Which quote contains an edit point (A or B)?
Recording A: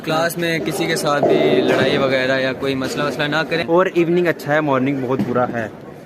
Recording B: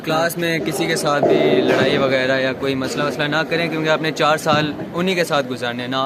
A